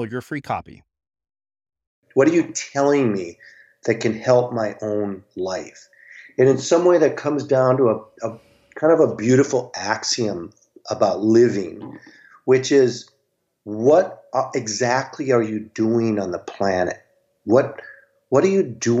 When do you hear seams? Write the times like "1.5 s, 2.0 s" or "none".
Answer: 2.0 s